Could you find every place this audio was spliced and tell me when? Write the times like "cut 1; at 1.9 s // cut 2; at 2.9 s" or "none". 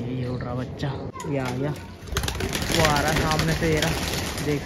cut 1; at 1.1 s